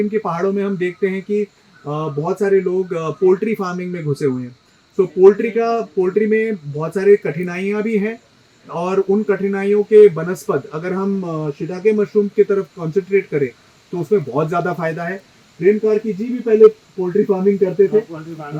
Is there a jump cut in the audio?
no; 0 cuts

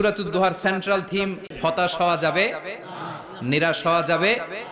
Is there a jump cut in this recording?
yes; 1 cut; at 1.4 s

